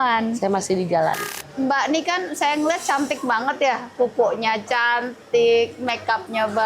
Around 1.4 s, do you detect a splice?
yes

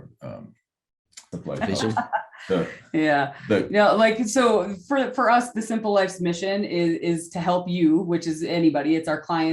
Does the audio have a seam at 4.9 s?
no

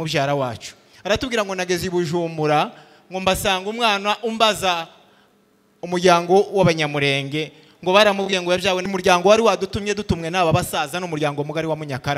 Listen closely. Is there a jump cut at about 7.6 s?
no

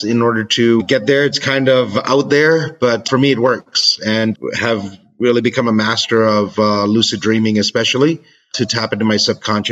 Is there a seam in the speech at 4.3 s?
yes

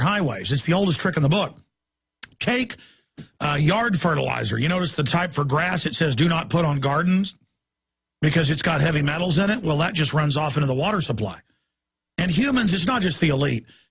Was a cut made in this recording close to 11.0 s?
yes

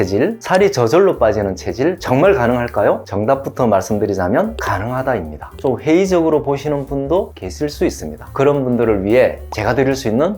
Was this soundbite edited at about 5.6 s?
yes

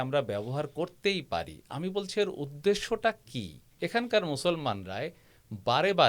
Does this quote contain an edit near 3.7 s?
yes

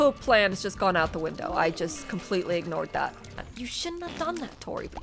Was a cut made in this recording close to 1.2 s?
no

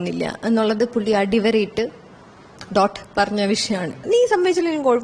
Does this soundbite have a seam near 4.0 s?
yes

